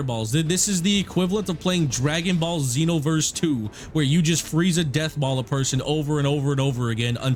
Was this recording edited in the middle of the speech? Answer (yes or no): no